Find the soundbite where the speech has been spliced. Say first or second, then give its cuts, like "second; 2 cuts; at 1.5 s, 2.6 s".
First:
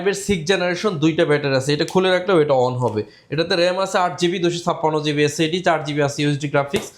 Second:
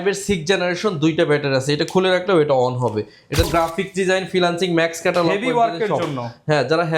second; 1 cut; at 3.5 s